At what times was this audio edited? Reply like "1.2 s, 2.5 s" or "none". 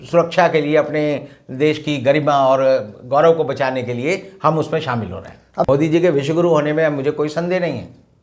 5.7 s